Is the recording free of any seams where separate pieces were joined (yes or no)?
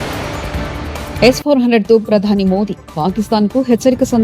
no